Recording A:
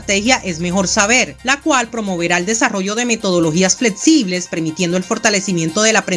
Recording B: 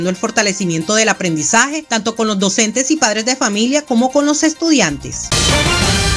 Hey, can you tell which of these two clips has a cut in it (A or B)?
B